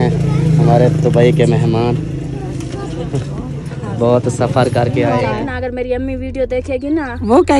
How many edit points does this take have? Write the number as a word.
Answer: one